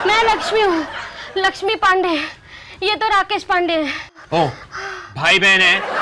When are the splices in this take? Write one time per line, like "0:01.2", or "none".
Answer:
0:04.1